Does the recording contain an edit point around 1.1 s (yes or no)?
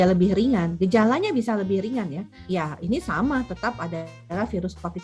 no